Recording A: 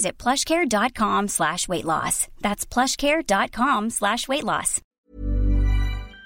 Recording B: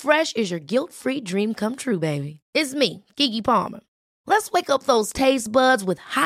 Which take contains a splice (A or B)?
A